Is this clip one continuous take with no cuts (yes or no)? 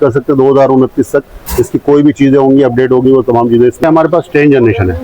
no